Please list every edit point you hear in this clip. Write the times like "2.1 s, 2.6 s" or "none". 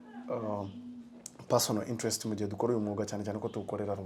none